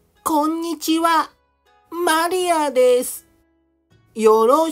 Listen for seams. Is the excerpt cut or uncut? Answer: uncut